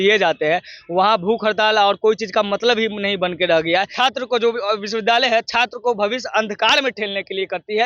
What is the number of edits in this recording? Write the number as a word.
one